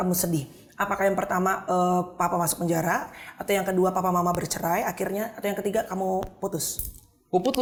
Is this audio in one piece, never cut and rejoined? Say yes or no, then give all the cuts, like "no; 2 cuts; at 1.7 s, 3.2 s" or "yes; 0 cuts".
yes; 0 cuts